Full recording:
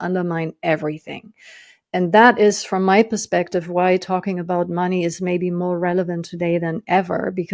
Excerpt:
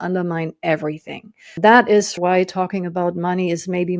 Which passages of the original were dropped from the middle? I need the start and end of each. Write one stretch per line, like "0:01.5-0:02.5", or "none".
0:01.6-0:02.1
0:02.6-0:03.7